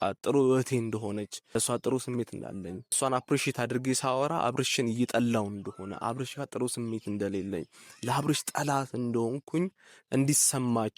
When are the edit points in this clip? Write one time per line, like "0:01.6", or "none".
0:01.4
0:03.0